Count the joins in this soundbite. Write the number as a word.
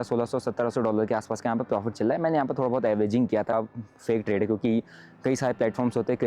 one